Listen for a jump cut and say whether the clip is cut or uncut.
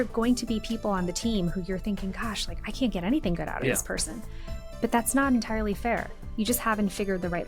uncut